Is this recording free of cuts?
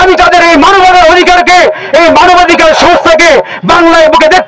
yes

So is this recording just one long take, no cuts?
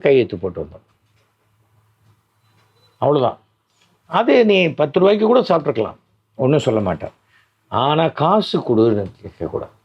yes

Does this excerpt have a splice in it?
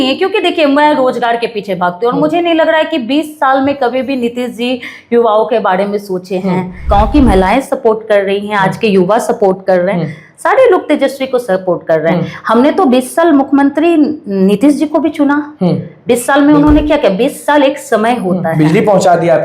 yes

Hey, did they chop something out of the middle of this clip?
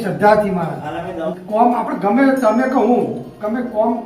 yes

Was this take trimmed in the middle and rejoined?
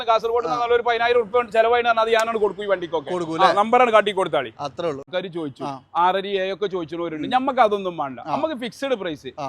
yes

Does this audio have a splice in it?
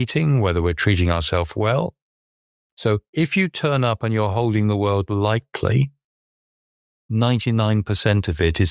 no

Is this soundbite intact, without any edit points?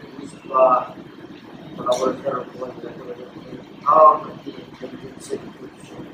yes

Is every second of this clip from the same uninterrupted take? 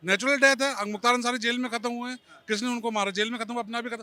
yes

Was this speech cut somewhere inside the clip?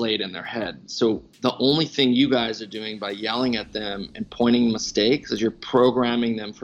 no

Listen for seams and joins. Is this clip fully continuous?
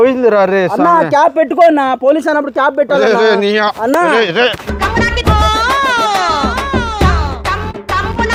yes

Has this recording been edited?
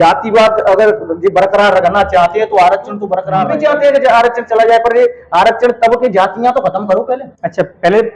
yes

